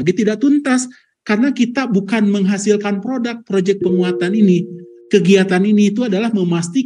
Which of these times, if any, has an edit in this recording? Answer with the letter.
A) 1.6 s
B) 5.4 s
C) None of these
C